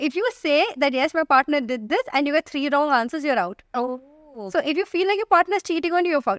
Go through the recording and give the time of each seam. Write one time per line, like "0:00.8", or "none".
none